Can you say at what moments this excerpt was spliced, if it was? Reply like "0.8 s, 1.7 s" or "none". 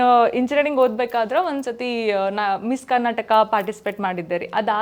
none